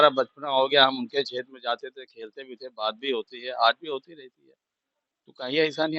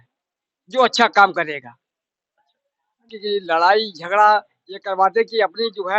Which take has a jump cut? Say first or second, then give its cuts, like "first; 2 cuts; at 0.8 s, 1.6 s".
second; 1 cut; at 3.1 s